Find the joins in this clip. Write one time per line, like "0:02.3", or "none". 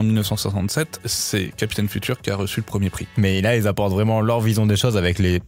0:03.0